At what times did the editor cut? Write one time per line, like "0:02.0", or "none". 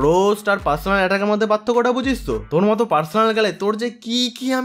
none